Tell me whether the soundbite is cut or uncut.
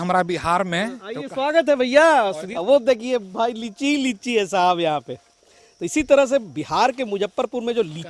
cut